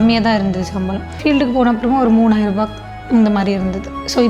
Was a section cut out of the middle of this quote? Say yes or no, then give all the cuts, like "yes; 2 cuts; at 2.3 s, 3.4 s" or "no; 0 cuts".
yes; 1 cut; at 1.2 s